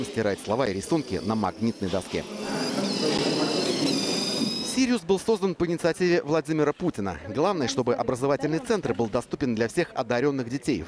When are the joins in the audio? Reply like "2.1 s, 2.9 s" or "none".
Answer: 6.2 s